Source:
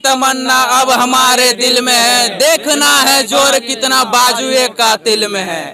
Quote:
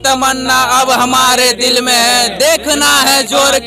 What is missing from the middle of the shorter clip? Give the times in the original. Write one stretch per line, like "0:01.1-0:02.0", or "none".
none